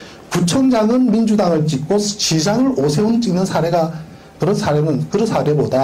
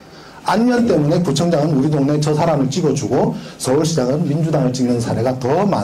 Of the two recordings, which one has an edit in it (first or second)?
first